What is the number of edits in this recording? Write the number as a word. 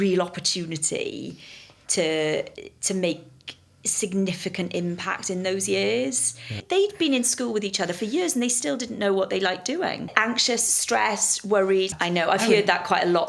three